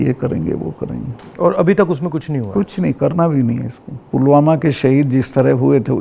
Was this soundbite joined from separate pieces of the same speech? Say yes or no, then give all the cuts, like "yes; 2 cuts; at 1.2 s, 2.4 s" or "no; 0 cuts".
no; 0 cuts